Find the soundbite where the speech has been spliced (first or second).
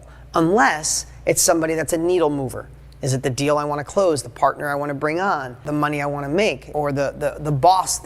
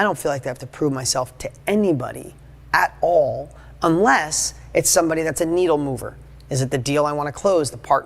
first